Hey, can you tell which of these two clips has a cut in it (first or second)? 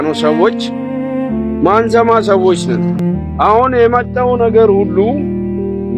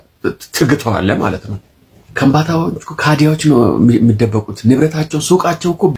first